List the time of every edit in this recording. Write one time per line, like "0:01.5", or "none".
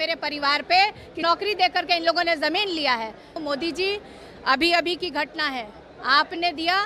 0:01.2
0:03.4